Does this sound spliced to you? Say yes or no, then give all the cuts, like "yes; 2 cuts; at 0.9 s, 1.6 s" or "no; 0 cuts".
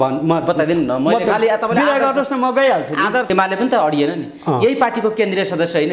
yes; 1 cut; at 3.3 s